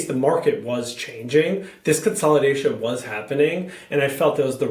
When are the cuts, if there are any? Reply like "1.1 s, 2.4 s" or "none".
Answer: none